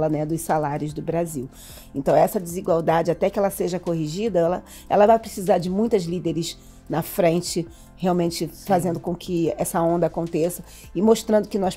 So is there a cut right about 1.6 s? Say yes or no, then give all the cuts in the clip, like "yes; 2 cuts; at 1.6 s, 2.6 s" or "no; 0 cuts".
no; 0 cuts